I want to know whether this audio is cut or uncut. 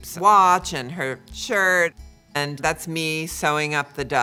uncut